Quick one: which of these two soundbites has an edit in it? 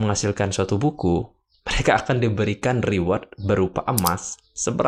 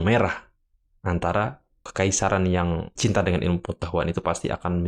second; 2 cuts; at 1.9 s, 2.9 s

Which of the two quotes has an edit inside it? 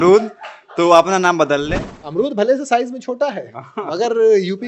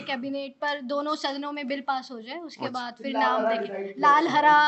first; 1 cut; at 1.9 s

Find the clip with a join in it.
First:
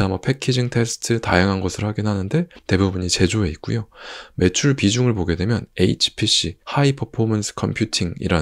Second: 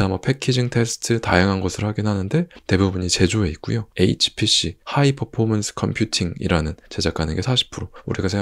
second; 2 cuts; at 3.9 s, 6.9 s

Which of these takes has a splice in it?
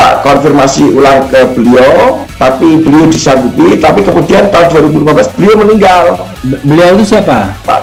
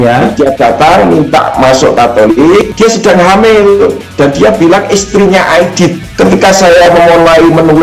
second; 3 cuts; at 2.7 s, 4.0 s, 6.0 s

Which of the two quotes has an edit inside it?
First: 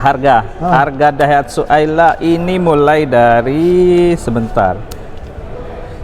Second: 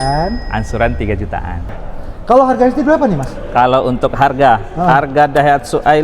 second; 1 cut; at 1.7 s

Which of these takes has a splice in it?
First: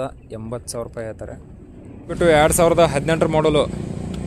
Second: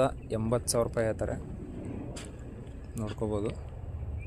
first; 1 cut; at 2.1 s

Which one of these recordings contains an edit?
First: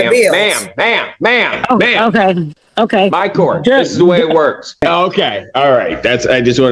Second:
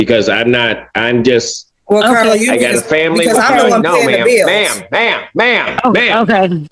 first; 1 cut; at 4.7 s

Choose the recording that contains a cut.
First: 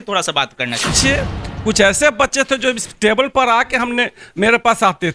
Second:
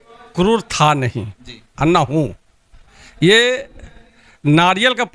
first; 1 cut; at 0.9 s

